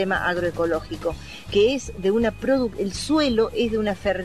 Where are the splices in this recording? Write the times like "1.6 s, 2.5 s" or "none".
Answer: none